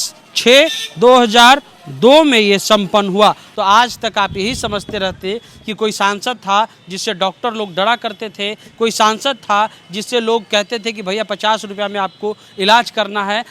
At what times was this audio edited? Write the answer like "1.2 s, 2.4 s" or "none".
3.5 s